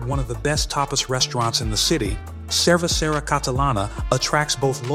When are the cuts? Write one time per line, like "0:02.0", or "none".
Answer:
none